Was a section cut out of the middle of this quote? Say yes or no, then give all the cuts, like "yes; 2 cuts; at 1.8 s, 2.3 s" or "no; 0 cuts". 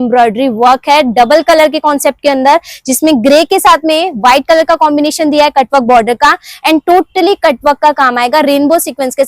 no; 0 cuts